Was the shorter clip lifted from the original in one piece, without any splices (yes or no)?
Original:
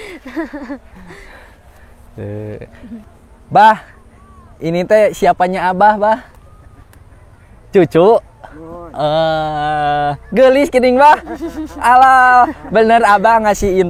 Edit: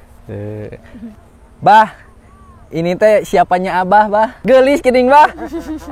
no